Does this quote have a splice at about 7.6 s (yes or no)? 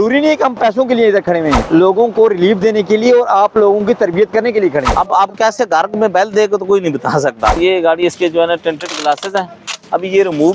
yes